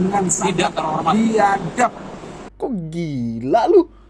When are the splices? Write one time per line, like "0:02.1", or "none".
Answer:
0:02.4